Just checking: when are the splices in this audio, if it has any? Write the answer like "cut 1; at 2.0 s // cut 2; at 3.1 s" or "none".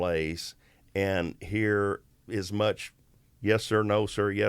cut 1; at 2.1 s